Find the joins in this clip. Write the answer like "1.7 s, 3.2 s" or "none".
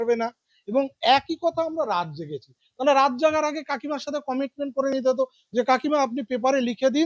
none